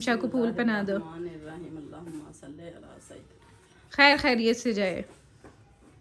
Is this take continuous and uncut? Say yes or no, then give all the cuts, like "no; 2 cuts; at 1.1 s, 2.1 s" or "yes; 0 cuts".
yes; 0 cuts